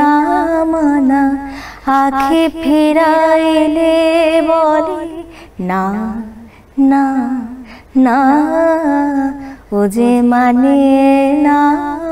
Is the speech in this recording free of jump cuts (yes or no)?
yes